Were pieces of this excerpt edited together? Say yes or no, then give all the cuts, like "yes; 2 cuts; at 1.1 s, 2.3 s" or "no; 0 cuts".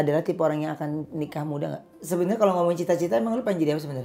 yes; 1 cut; at 1.9 s